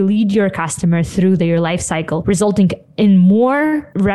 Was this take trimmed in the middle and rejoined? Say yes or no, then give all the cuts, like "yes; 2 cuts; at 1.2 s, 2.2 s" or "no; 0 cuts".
no; 0 cuts